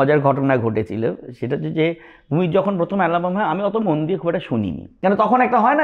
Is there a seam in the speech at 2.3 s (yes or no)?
no